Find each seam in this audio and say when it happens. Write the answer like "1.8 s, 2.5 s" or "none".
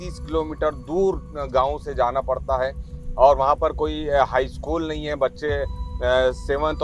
none